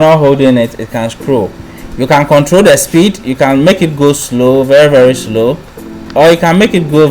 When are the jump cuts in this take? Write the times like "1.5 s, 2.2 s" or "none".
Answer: 6.0 s